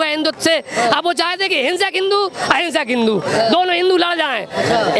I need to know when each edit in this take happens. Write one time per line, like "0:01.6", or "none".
none